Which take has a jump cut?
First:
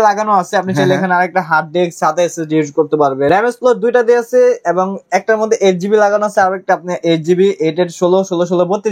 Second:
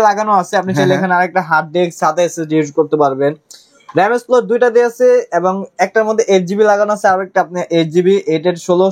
first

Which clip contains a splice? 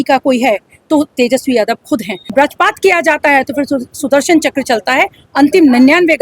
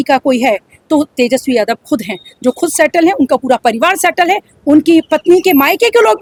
first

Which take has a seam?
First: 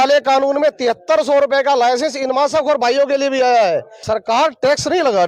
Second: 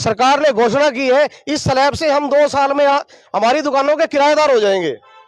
first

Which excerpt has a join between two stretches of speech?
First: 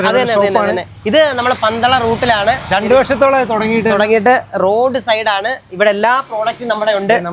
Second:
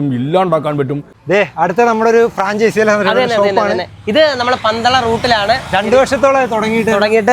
second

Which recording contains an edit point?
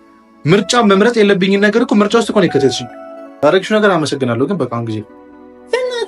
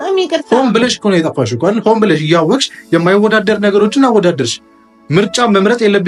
first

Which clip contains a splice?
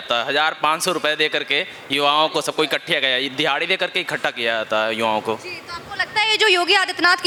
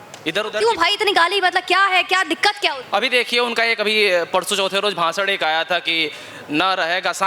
second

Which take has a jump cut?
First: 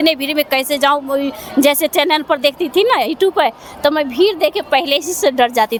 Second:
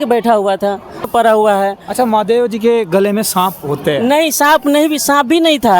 second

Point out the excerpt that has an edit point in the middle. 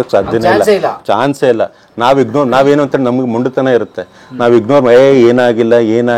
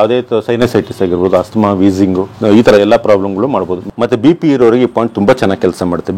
second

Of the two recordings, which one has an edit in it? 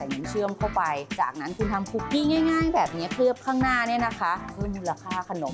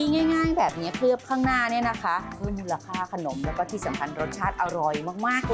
first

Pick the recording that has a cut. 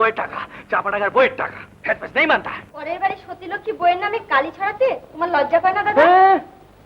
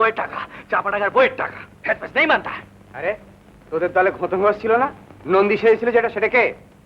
first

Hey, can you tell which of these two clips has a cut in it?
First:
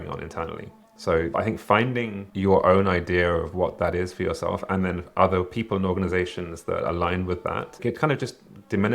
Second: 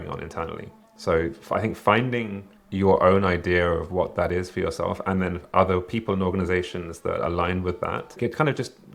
first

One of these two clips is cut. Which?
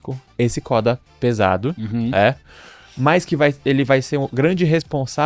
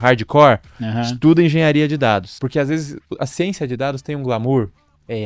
second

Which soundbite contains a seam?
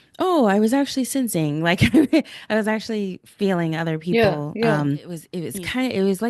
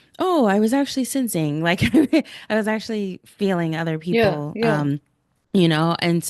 first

